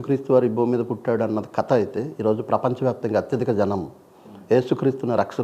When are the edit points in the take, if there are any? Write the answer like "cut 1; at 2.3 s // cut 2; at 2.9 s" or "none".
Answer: none